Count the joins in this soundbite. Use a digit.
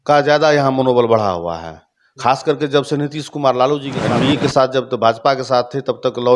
1